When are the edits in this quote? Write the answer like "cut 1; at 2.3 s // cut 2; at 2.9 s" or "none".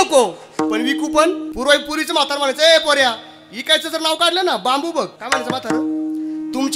cut 1; at 1.5 s // cut 2; at 5.2 s